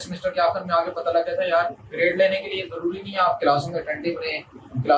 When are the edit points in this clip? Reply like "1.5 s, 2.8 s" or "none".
none